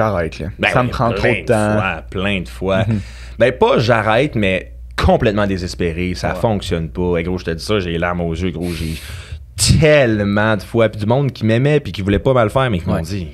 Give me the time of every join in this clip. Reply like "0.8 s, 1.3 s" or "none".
none